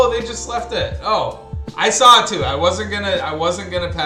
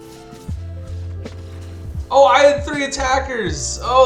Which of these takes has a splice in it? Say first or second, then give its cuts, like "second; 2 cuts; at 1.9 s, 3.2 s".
second; 1 cut; at 2.1 s